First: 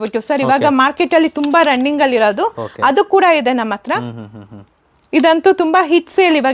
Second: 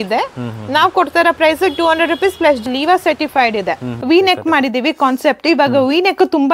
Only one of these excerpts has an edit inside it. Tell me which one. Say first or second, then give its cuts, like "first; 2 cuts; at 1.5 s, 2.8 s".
second; 2 cuts; at 2.7 s, 3.9 s